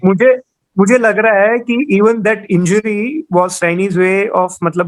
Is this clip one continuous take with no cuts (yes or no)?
yes